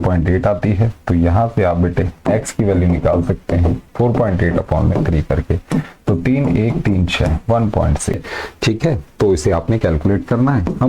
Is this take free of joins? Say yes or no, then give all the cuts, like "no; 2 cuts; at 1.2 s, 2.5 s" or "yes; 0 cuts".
no; 1 cut; at 8.3 s